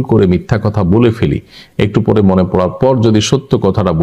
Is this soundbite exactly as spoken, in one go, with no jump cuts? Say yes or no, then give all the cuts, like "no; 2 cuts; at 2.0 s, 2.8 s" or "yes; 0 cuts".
yes; 0 cuts